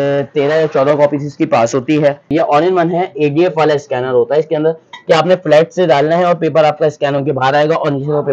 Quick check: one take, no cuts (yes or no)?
no